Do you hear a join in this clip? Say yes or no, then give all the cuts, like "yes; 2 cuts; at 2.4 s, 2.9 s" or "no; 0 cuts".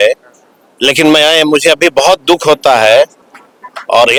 no; 0 cuts